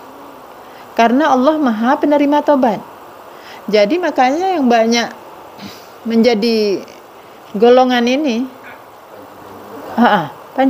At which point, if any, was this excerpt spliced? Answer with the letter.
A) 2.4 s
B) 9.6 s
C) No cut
C